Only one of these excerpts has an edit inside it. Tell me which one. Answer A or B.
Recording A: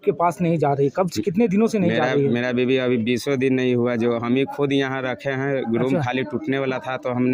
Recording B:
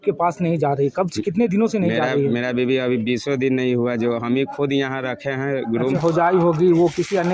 B